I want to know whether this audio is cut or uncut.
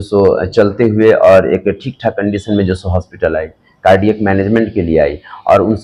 uncut